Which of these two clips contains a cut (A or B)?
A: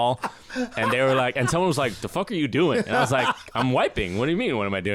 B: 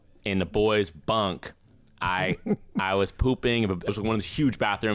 B